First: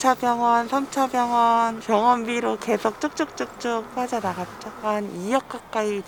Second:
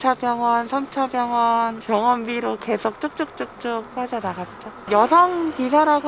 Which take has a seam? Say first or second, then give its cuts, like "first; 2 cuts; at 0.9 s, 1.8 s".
second; 1 cut; at 4.8 s